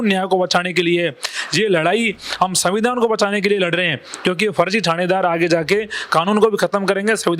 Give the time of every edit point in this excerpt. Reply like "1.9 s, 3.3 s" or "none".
none